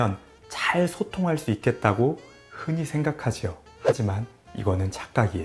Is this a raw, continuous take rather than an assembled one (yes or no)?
no